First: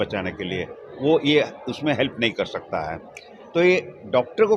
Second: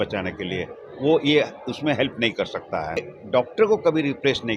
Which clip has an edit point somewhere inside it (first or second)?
second